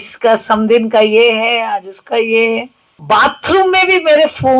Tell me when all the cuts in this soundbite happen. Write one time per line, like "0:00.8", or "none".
0:03.0

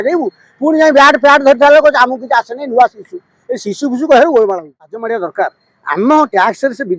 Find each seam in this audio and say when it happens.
0:04.9

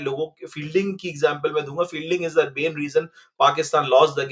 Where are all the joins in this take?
none

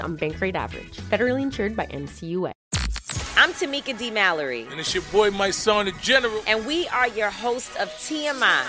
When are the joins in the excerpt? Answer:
0:02.6

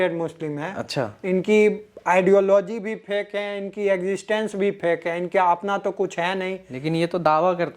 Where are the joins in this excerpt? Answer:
none

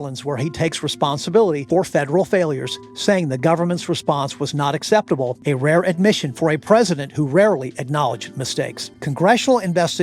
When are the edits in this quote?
0:01.6
0:05.4
0:08.9

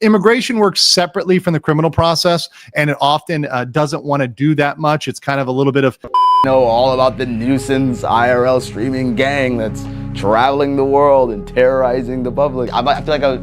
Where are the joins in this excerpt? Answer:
0:06.2

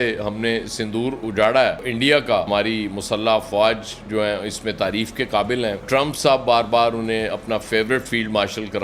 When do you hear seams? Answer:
0:02.5
0:05.8

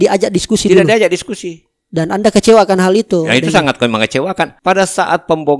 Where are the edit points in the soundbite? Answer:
0:04.6

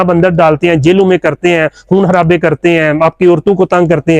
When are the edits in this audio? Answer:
none

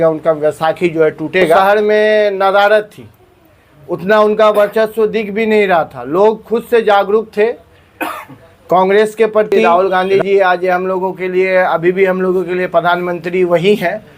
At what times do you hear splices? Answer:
0:01.6
0:09.6

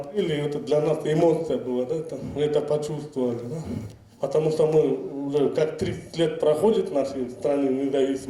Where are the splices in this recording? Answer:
none

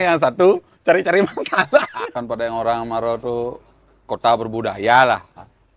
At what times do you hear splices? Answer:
0:01.9

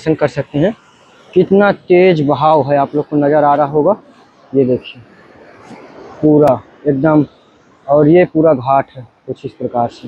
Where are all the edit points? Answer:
none

